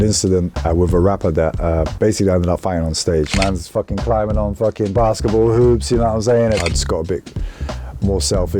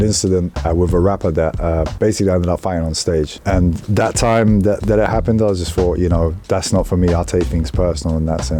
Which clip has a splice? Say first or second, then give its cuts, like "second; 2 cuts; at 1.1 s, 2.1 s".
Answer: first; 2 cuts; at 3.3 s, 6.6 s